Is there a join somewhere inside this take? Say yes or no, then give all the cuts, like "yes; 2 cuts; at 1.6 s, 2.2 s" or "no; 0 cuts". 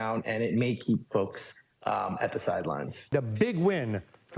yes; 1 cut; at 3.0 s